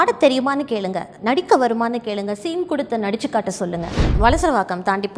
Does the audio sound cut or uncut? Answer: cut